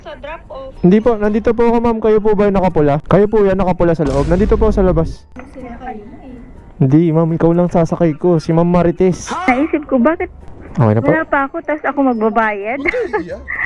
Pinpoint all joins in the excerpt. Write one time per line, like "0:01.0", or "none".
0:03.0
0:05.3
0:09.3

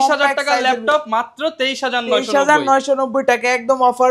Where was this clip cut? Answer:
none

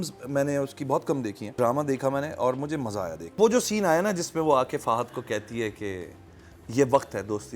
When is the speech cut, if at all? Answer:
0:01.4
0:03.4

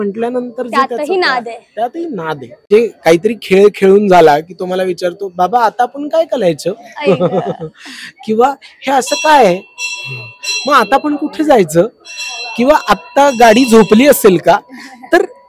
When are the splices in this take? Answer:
0:02.7

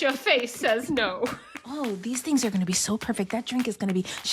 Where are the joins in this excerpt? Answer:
0:01.6

